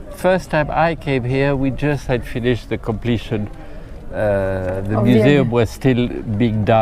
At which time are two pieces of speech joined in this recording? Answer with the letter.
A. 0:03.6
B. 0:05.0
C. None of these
C